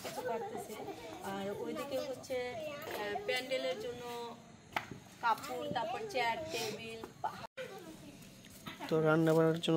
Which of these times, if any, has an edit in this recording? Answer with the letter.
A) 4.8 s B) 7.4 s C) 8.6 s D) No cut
B